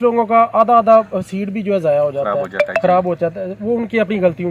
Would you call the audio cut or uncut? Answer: uncut